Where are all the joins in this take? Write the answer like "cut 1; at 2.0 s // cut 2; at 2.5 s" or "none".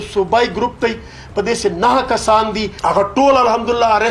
cut 1; at 2.7 s

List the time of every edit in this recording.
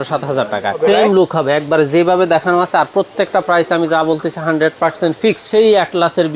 cut 1; at 0.8 s // cut 2; at 5.4 s

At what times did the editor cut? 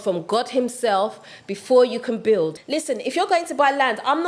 cut 1; at 2.6 s

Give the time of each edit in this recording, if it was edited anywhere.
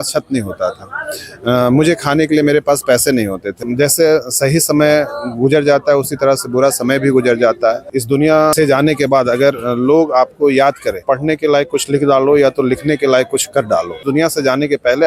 cut 1; at 3.6 s // cut 2; at 8.2 s // cut 3; at 11.0 s // cut 4; at 14.0 s

